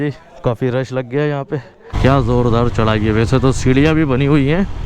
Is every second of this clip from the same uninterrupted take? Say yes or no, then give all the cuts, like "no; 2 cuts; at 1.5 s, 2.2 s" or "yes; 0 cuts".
no; 1 cut; at 1.8 s